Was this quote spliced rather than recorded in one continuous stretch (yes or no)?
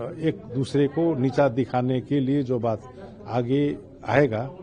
no